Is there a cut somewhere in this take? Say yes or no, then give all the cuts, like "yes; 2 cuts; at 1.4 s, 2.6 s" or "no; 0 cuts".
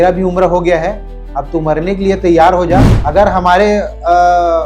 yes; 1 cut; at 3.0 s